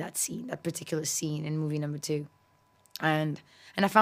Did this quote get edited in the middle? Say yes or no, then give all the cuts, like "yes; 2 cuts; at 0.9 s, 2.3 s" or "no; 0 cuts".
no; 0 cuts